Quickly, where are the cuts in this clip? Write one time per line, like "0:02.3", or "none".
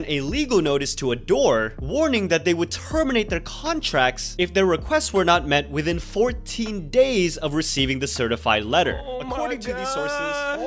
none